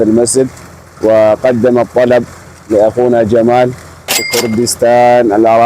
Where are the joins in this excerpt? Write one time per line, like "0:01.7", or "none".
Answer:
0:04.2